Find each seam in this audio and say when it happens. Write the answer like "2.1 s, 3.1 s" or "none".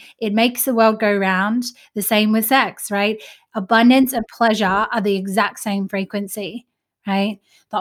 none